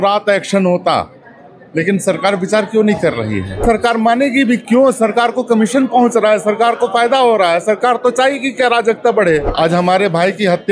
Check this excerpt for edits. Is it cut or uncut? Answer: cut